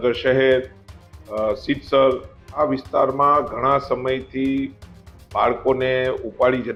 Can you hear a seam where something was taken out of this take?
no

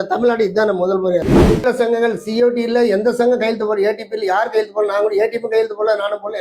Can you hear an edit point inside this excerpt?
yes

